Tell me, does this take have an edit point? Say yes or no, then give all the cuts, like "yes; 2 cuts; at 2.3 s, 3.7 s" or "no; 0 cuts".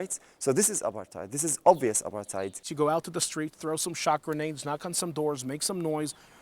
yes; 1 cut; at 2.6 s